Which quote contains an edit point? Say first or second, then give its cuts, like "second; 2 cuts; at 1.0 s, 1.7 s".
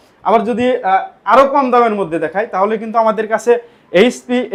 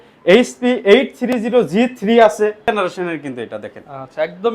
second; 1 cut; at 2.7 s